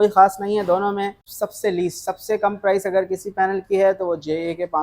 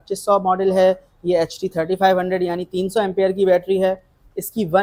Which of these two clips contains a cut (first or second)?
first